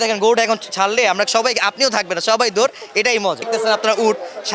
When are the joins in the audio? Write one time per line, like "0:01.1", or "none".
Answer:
0:03.5